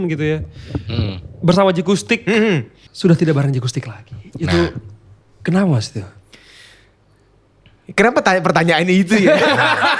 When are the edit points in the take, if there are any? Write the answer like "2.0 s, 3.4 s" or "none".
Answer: 2.8 s